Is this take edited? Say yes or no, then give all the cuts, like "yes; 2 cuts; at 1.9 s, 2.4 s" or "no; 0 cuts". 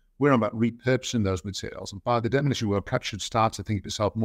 yes; 1 cut; at 2.2 s